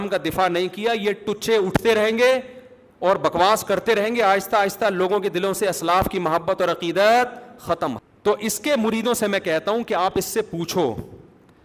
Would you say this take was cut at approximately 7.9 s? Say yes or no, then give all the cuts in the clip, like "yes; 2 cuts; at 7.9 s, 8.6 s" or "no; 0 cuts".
yes; 1 cut; at 7.9 s